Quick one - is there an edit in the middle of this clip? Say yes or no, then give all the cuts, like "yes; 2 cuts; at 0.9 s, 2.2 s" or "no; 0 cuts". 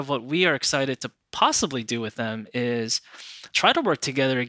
no; 0 cuts